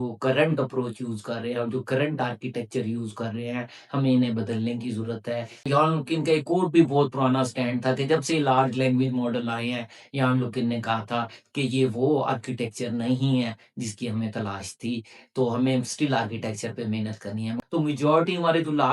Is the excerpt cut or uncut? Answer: cut